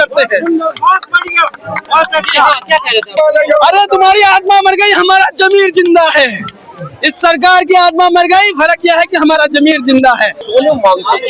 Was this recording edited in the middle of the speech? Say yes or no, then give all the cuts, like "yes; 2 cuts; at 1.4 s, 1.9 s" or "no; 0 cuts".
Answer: yes; 2 cuts; at 3.1 s, 10.4 s